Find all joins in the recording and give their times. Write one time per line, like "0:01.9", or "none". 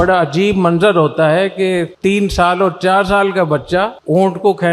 none